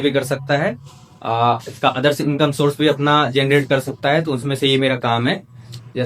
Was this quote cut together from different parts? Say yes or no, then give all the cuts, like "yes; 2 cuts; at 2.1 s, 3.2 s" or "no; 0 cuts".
no; 0 cuts